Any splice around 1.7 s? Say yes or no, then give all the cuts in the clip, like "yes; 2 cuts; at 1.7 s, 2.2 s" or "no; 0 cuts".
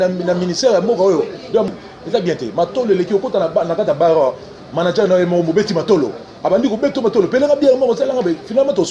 yes; 1 cut; at 1.7 s